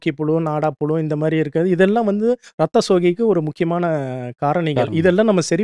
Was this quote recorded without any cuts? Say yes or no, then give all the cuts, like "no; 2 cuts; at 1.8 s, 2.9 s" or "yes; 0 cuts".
yes; 0 cuts